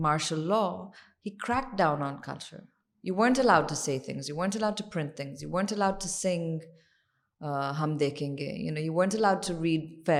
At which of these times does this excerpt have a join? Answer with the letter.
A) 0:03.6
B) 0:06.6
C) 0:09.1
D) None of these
D